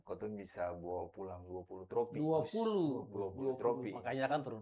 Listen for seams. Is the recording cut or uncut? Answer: uncut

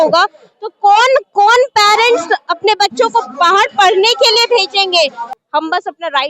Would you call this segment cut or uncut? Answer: cut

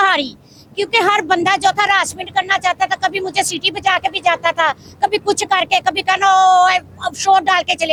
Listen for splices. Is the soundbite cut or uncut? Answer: uncut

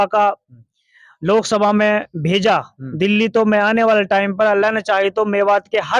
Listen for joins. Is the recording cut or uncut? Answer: uncut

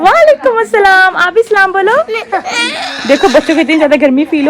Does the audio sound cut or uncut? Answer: uncut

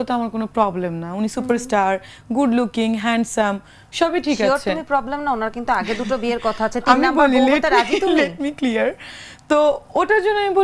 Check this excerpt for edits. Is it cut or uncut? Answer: uncut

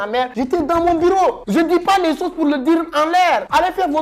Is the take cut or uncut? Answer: uncut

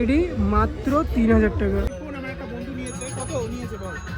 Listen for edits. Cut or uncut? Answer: uncut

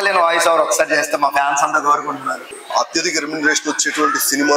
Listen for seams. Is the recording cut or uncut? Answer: cut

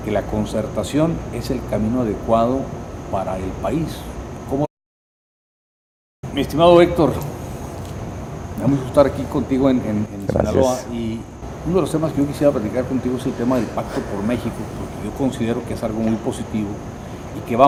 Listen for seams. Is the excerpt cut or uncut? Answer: uncut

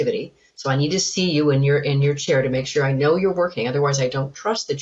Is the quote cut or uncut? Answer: uncut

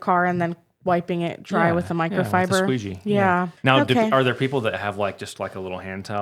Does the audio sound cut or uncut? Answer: cut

